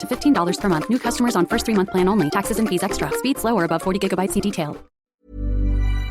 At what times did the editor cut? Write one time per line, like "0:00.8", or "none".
0:04.9